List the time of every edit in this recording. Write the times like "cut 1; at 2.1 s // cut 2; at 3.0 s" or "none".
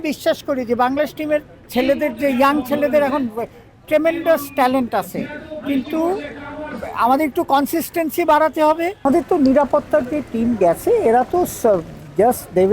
cut 1; at 8.9 s